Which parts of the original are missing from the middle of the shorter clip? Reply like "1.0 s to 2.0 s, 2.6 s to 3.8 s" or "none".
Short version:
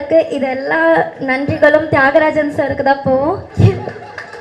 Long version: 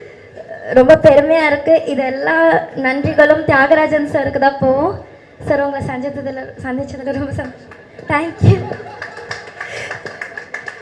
5.1 s to 8.3 s